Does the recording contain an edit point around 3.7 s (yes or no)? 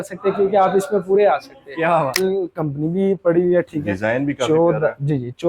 no